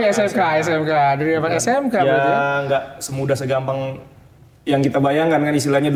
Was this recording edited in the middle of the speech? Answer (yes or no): no